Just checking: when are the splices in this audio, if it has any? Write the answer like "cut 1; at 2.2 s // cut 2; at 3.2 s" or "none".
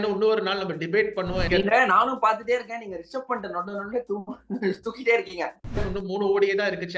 cut 1; at 1.4 s // cut 2; at 5.8 s